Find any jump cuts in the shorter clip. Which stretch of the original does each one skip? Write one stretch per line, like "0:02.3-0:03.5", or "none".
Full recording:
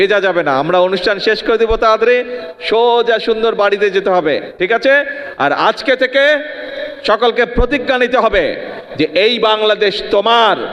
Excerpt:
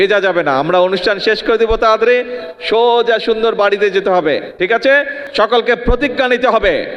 0:05.2-0:06.9